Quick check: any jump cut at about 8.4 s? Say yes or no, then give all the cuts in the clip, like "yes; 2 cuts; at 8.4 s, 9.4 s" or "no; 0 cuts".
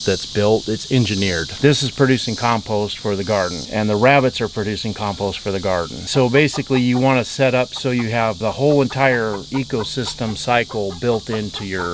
yes; 2 cuts; at 1.5 s, 8.4 s